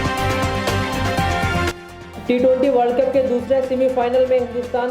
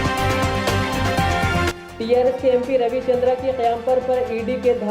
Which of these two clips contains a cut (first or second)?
second